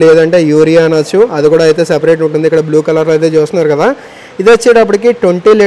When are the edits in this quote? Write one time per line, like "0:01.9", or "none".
none